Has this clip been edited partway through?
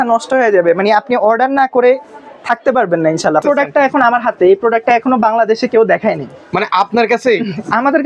yes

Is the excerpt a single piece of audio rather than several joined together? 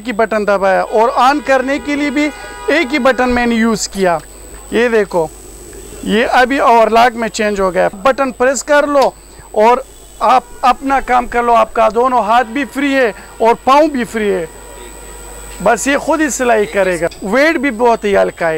no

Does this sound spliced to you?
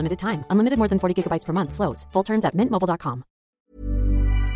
yes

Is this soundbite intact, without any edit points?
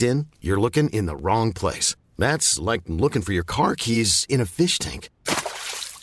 yes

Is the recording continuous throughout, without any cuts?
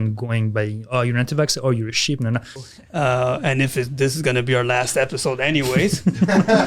no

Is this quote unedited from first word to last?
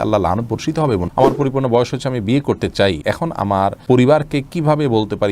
no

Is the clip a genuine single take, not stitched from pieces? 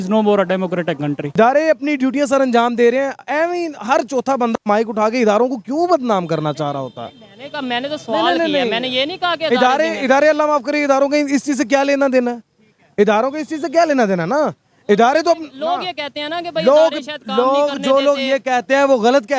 no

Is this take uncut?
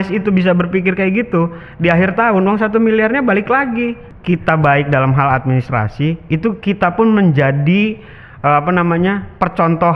no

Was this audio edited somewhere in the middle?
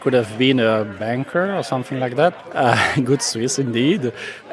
yes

